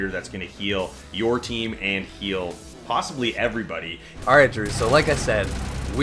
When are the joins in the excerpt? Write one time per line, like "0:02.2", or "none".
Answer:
0:04.1